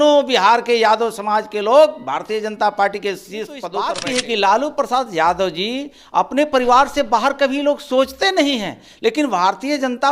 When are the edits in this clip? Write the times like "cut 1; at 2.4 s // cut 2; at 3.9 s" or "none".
cut 1; at 3.7 s